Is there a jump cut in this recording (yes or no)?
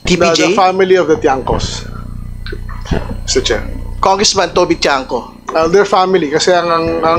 no